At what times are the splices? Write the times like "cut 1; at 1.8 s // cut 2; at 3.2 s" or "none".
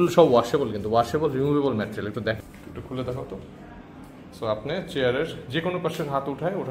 cut 1; at 2.4 s